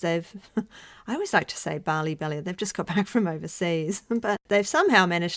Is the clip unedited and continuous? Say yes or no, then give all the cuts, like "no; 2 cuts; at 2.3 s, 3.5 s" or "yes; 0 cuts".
no; 1 cut; at 4.4 s